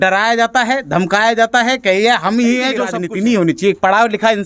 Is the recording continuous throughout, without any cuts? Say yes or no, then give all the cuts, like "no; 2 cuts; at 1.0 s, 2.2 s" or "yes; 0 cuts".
no; 1 cut; at 3.0 s